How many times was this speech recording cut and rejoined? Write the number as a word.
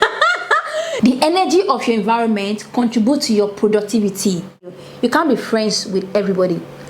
two